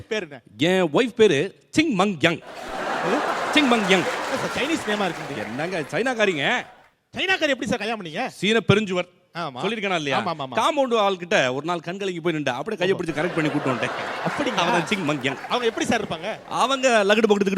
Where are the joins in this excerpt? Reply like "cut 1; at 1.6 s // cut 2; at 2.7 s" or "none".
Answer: none